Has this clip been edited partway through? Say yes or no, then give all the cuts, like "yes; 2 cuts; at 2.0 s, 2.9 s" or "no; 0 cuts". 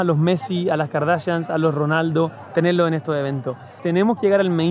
no; 0 cuts